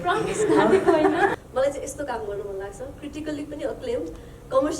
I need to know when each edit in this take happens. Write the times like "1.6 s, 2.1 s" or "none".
1.3 s